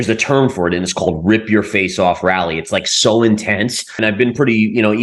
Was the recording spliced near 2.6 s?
no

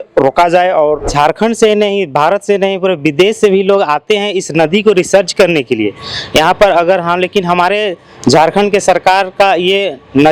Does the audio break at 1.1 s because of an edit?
yes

